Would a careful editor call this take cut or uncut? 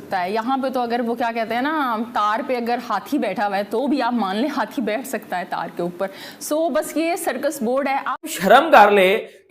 cut